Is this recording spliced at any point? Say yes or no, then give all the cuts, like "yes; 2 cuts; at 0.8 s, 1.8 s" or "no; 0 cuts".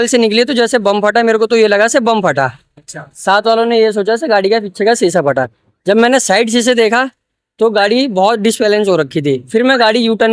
no; 0 cuts